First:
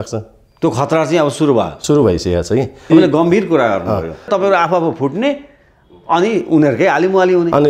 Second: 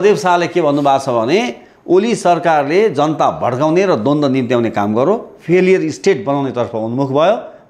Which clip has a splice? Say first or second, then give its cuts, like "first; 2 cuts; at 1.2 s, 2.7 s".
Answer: first; 2 cuts; at 2.8 s, 4.3 s